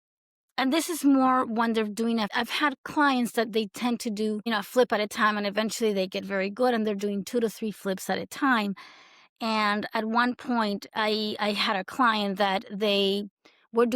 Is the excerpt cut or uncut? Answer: cut